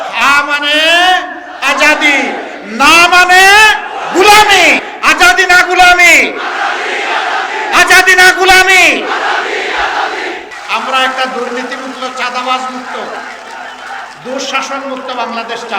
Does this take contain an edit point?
yes; 2 cuts; at 4.9 s, 10.5 s

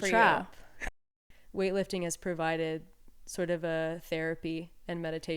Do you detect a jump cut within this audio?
yes; 1 cut; at 0.9 s

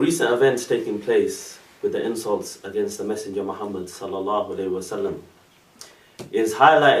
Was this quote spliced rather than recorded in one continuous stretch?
no; 0 cuts

